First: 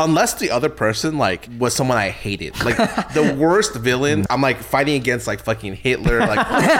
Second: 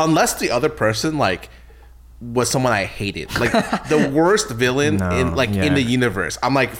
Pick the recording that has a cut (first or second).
first